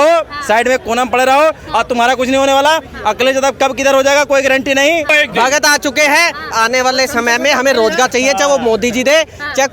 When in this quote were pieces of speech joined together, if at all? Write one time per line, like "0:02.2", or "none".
0:05.1

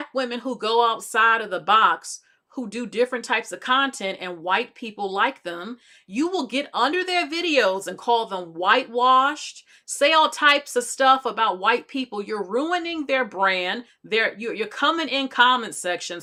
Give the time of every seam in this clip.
none

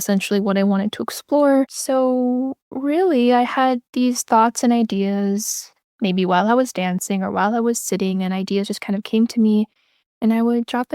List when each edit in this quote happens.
0:01.8

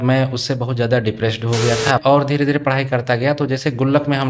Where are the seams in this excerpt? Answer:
0:02.0

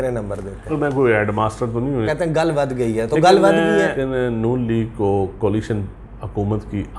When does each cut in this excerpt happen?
0:00.7
0:02.1
0:04.0

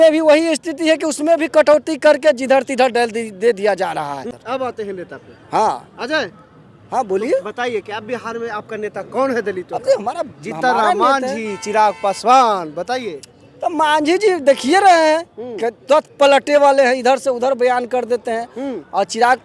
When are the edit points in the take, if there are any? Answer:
0:04.3

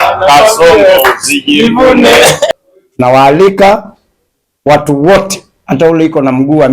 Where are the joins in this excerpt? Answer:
0:02.5

